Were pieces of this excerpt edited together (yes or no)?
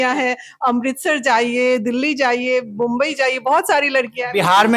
no